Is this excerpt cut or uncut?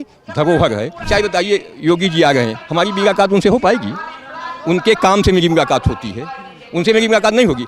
cut